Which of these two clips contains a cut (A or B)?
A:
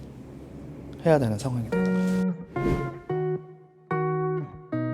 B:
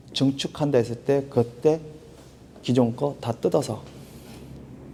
A